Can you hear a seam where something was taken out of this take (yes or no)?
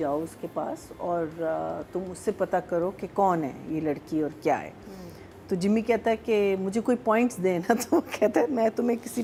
no